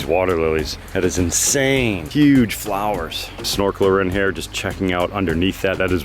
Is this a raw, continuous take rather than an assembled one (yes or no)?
no